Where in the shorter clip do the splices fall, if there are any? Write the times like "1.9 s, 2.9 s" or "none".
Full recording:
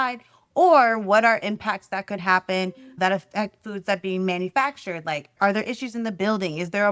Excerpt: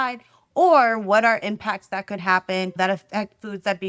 2.7 s

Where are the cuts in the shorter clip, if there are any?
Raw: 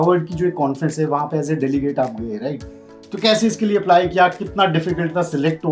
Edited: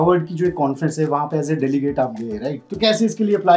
2.6 s

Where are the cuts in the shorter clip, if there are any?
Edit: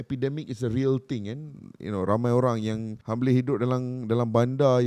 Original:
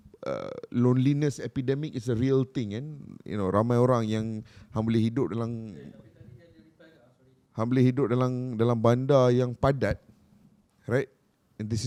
2.9 s

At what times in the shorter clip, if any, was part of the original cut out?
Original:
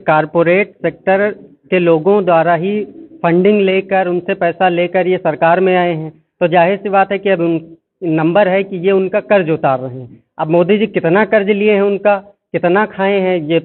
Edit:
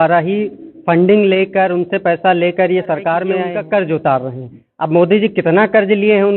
3.4 s

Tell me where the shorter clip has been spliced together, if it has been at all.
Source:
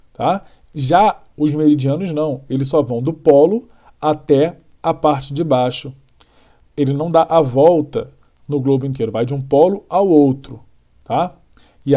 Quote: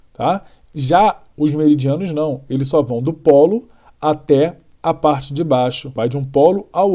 6.0 s

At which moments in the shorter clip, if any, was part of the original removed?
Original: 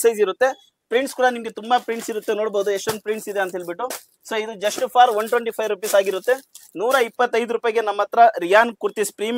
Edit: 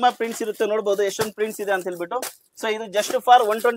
none

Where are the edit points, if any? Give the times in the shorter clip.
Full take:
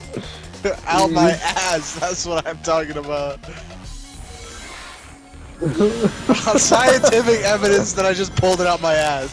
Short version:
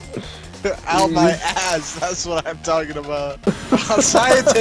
3.4 s

